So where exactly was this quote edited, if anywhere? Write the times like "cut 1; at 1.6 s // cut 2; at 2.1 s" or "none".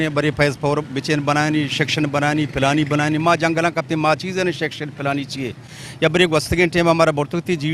none

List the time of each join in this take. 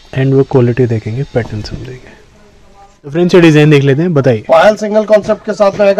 cut 1; at 2.9 s

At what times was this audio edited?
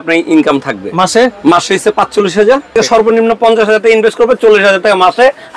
cut 1; at 2.8 s

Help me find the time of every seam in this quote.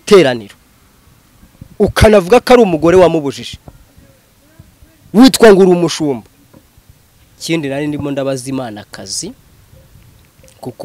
cut 1; at 7.3 s

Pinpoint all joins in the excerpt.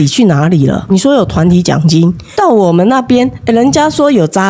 cut 1; at 0.9 s // cut 2; at 2.2 s

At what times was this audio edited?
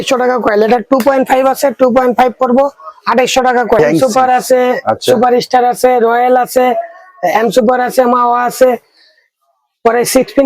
cut 1; at 3.8 s

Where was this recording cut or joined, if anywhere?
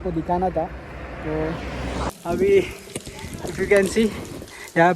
cut 1; at 2.1 s

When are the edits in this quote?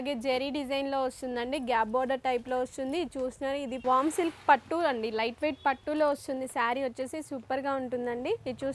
cut 1; at 3.7 s

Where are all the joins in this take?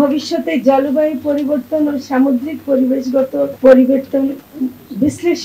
none

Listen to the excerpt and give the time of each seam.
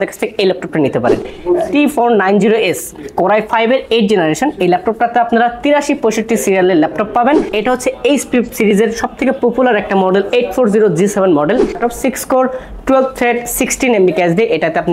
cut 1; at 1.3 s // cut 2; at 7.5 s // cut 3; at 11.8 s

